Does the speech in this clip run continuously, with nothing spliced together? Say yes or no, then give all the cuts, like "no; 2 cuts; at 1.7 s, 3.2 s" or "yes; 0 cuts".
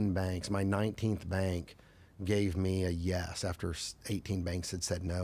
yes; 0 cuts